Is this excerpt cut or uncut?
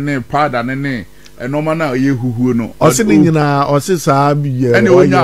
uncut